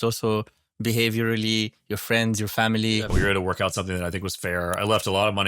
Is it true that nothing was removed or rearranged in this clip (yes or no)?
no